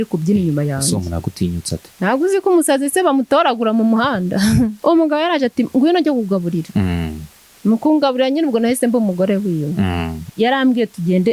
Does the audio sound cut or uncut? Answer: cut